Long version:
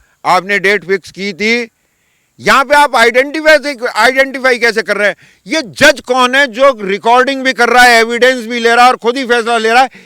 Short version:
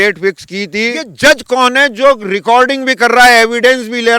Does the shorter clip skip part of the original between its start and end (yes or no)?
yes